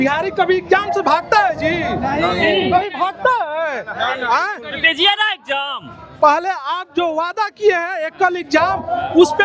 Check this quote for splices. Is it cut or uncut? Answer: uncut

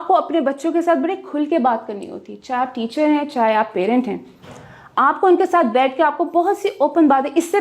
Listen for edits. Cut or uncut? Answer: uncut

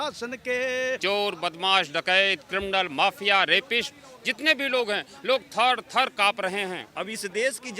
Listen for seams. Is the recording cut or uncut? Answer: cut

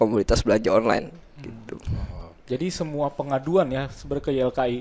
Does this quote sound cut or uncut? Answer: uncut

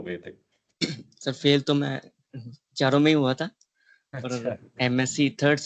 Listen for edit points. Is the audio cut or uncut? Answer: uncut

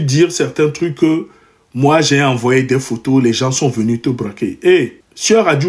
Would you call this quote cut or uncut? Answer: uncut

